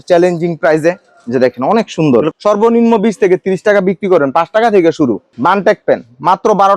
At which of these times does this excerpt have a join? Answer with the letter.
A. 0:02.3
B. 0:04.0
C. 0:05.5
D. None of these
A